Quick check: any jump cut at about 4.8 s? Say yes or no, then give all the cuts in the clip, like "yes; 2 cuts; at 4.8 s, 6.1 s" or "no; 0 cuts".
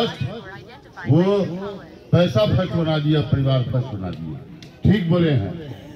no; 0 cuts